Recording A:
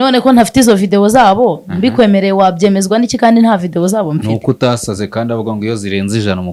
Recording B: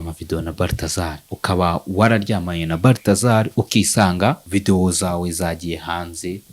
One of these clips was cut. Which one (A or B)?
B